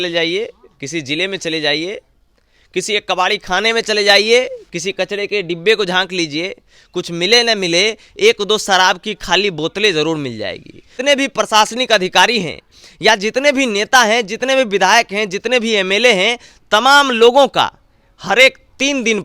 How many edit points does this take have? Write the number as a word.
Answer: one